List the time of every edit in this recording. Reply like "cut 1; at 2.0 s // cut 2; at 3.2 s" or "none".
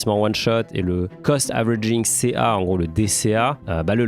none

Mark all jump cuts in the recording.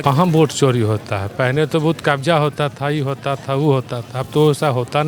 none

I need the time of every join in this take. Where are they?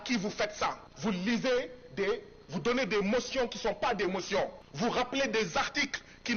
cut 1; at 0.9 s // cut 2; at 4.6 s

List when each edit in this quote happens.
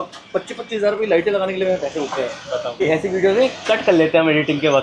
cut 1; at 2.8 s

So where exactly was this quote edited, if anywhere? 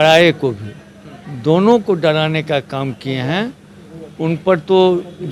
none

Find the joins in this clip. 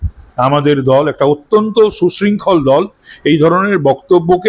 none

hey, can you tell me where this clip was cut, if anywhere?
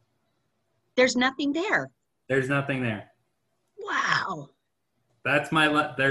cut 1; at 5.1 s

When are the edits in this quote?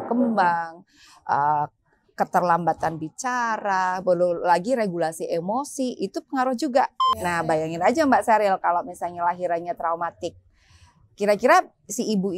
cut 1; at 7.0 s

